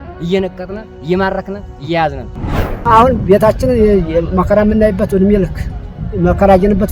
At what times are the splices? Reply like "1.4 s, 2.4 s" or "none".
2.5 s